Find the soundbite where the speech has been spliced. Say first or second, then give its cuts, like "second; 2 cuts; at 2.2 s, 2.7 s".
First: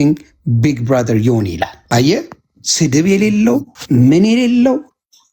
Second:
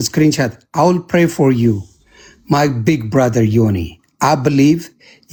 first; 2 cuts; at 1.8 s, 3.7 s